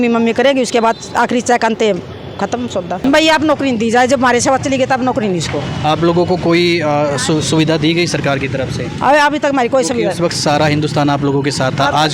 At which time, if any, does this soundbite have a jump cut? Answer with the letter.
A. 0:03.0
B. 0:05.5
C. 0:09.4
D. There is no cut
A